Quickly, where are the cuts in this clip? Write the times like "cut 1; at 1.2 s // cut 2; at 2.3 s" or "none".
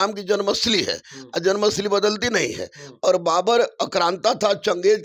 none